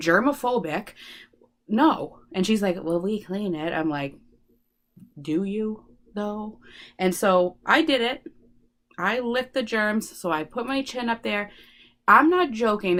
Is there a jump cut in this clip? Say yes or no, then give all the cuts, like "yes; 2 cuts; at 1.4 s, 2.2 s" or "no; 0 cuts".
no; 0 cuts